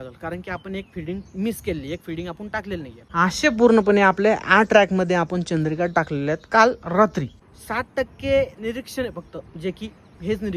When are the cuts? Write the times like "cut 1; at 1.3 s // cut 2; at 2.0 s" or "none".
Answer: cut 1; at 3.0 s // cut 2; at 7.4 s